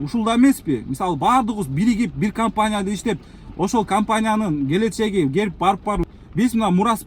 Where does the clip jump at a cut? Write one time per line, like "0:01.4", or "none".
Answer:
0:06.0